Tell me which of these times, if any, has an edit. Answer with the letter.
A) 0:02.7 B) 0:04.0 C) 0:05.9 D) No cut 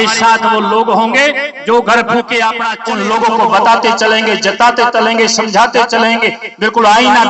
A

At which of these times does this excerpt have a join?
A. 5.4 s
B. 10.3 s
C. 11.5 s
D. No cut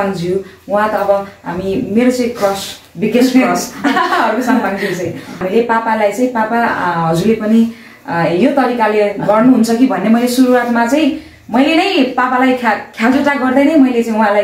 A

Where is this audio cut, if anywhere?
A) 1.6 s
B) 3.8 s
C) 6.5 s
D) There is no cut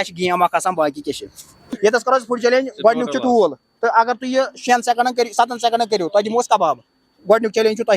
A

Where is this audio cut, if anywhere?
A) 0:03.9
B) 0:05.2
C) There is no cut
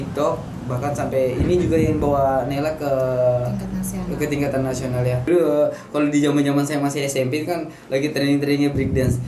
C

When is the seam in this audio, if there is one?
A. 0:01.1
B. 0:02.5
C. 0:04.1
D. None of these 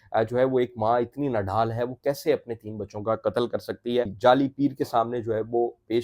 C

